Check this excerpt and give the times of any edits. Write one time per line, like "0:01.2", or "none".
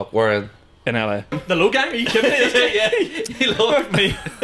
0:01.3